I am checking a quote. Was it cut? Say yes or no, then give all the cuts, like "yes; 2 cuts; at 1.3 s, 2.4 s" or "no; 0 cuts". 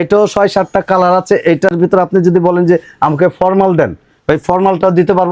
no; 0 cuts